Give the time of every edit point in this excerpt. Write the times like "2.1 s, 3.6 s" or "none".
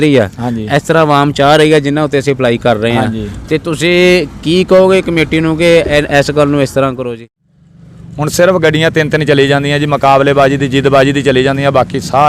7.1 s